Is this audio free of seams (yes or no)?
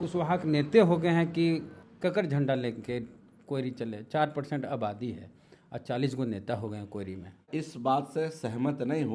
no